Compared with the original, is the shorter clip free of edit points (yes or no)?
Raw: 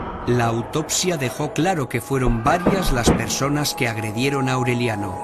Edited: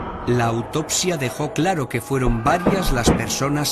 yes